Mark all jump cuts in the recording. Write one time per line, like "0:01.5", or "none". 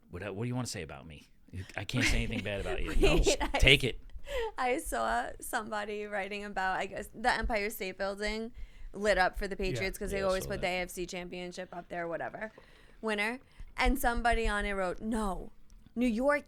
none